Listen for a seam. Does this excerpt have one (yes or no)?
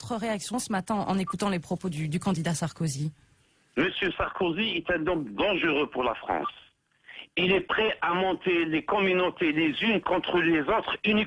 yes